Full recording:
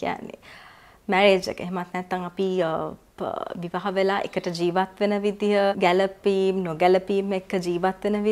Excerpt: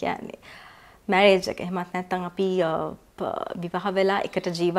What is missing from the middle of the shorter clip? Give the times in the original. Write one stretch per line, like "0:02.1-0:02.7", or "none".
none